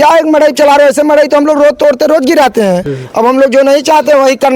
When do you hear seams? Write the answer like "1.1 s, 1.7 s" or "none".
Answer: 2.9 s